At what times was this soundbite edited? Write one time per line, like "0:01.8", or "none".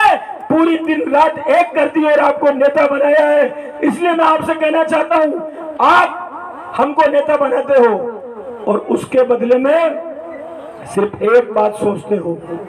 none

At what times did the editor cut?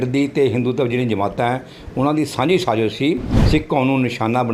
0:03.3

